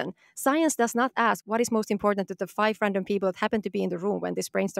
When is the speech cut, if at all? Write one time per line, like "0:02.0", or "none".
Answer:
0:01.4